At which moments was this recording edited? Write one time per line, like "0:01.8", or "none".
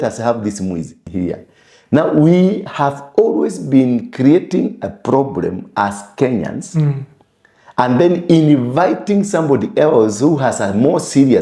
0:01.0